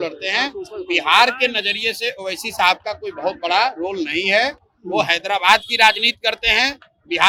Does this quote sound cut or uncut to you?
uncut